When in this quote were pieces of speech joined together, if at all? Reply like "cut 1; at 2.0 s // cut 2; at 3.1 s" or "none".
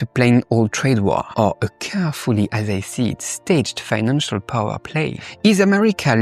cut 1; at 1.3 s // cut 2; at 5.2 s